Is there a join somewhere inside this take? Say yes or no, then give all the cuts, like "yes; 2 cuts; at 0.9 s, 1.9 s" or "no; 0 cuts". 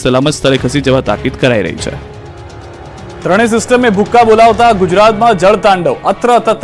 yes; 1 cut; at 1.7 s